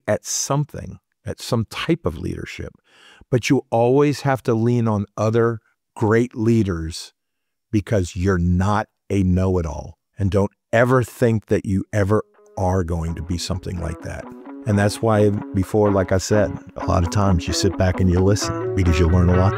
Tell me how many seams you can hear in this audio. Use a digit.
1